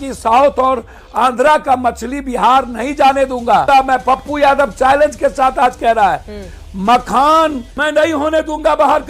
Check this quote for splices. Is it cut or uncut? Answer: cut